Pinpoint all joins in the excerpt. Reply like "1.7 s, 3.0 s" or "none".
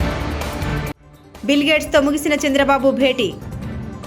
1.0 s